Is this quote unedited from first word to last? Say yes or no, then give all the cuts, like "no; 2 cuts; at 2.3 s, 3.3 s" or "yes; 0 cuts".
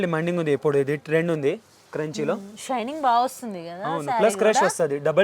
yes; 0 cuts